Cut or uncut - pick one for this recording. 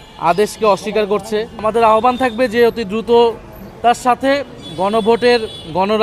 cut